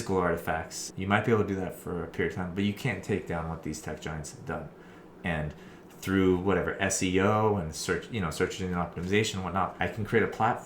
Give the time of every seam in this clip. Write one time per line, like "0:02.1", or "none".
0:09.7